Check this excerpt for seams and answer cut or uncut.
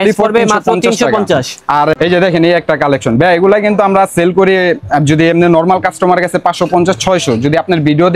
cut